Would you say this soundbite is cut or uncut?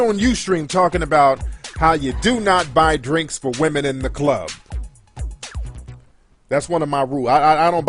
cut